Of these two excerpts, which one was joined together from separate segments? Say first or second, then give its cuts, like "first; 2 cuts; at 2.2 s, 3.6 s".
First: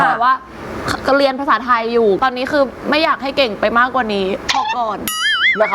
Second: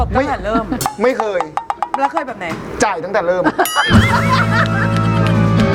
first; 1 cut; at 2.2 s